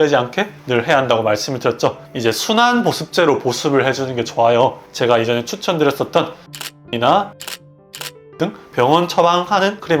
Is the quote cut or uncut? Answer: cut